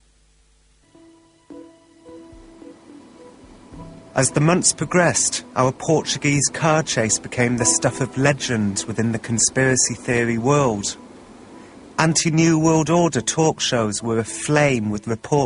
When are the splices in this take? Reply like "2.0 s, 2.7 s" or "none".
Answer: 12.9 s

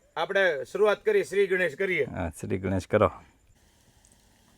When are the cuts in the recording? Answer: 3.5 s

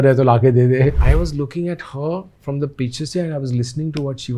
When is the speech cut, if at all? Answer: 1.0 s

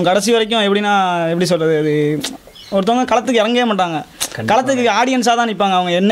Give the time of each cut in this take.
none

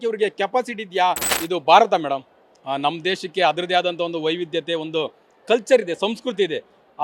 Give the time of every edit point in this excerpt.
1.3 s

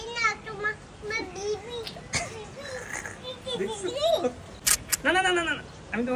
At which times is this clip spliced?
4.6 s

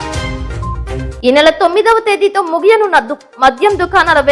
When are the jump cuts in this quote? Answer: 1.0 s

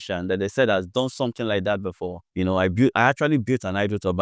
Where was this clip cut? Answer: 2.2 s

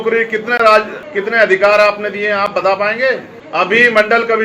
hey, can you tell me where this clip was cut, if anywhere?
1.0 s, 3.3 s

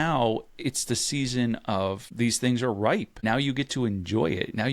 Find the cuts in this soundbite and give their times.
2.1 s, 3.2 s

